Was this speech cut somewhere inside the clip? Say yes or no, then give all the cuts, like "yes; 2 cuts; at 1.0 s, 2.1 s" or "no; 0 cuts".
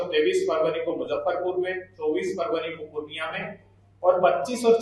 no; 0 cuts